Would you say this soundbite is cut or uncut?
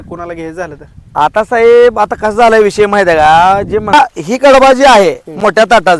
cut